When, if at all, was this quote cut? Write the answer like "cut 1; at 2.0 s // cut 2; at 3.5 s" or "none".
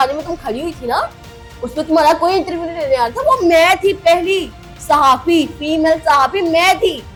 none